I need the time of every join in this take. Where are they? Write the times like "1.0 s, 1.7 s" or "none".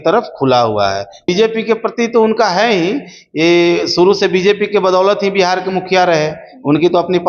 1.2 s